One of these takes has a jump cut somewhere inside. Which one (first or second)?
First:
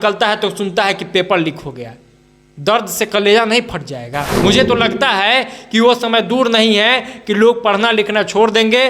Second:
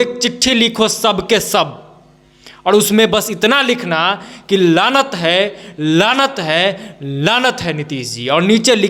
first